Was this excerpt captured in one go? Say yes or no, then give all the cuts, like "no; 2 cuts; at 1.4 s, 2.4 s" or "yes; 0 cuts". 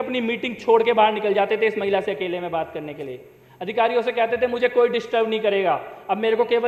yes; 0 cuts